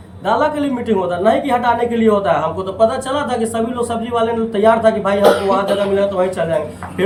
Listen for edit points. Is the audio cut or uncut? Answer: uncut